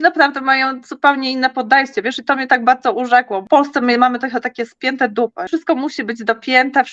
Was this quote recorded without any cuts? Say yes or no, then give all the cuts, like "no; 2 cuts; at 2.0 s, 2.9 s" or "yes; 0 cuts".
no; 2 cuts; at 3.4 s, 5.5 s